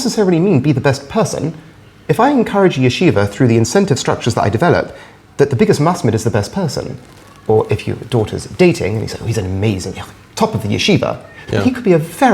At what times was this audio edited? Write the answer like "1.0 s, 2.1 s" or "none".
11.4 s